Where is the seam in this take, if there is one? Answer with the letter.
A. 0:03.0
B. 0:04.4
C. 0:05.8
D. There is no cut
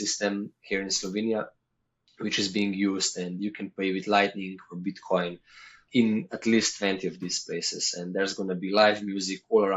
C